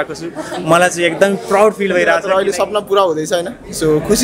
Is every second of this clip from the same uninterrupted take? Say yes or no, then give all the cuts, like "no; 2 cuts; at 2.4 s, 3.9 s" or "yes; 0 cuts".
no; 1 cut; at 2.2 s